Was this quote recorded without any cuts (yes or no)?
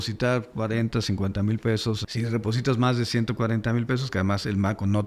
yes